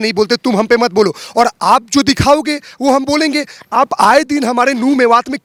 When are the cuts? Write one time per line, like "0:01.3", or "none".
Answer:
none

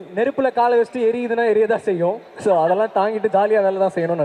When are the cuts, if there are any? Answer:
none

